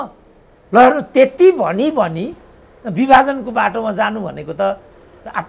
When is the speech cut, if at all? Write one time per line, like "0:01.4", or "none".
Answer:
none